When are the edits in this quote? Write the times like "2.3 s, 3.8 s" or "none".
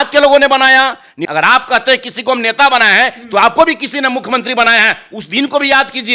1.2 s